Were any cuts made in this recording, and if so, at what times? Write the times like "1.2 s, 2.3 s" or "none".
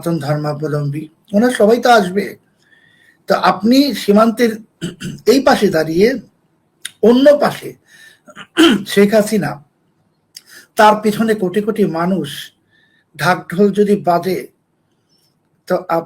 none